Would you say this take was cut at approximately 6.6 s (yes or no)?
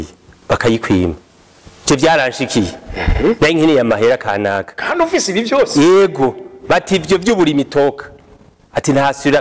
no